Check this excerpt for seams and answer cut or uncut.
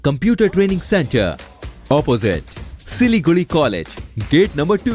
uncut